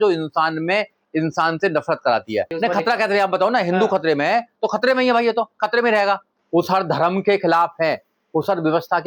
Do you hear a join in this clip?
yes; 2 cuts; at 2.5 s, 6.3 s

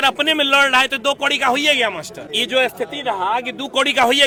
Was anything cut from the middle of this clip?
no; 0 cuts

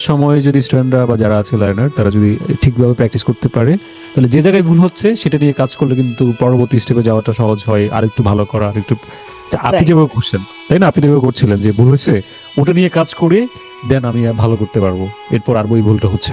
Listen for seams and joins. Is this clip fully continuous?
yes; 0 cuts

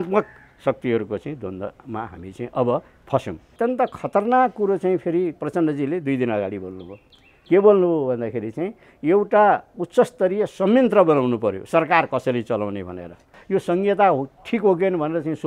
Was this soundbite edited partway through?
yes; 2 cuts; at 3.5 s, 13.3 s

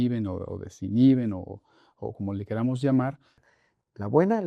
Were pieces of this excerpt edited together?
yes; 1 cut; at 3.4 s

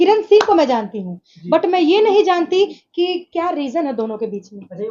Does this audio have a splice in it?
no; 0 cuts

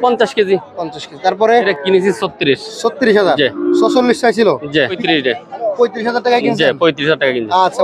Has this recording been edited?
yes; 2 cuts; at 1.6 s, 5.0 s

